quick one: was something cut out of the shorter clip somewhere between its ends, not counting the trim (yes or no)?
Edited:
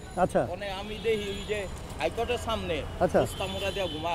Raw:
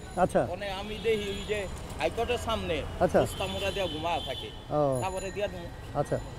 no